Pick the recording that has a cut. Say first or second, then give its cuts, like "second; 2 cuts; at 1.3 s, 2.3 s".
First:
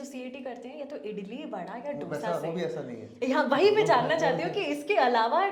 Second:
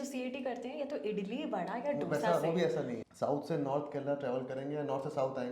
second; 1 cut; at 3.0 s